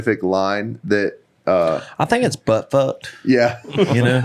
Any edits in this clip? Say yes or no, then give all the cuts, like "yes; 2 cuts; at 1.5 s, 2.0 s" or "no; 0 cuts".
no; 0 cuts